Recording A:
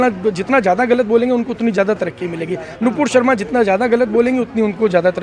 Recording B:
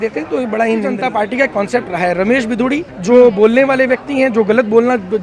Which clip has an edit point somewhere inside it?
B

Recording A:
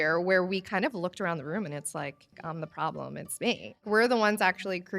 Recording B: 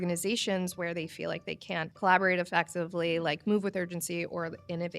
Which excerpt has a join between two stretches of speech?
A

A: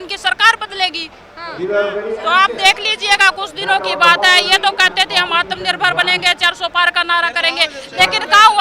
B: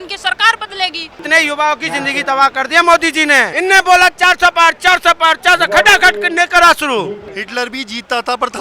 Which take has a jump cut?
B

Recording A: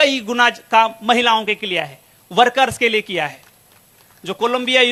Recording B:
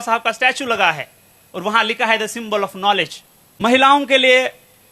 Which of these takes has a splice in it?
B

